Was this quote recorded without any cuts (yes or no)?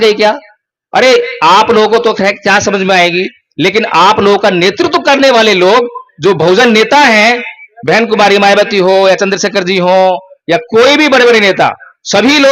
yes